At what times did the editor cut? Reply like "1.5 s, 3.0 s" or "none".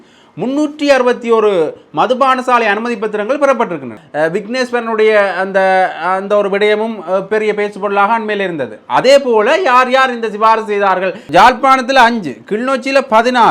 4.0 s, 11.2 s